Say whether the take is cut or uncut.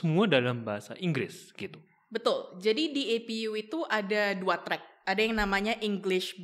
uncut